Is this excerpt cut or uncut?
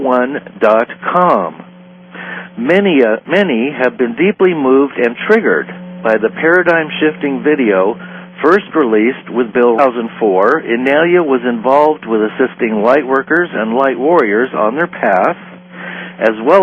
uncut